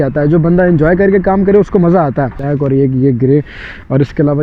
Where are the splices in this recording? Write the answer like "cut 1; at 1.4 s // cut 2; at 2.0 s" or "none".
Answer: cut 1; at 2.4 s